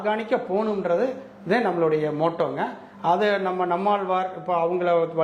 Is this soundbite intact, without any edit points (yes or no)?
yes